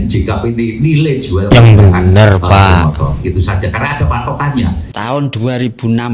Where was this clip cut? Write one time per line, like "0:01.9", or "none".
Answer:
0:04.9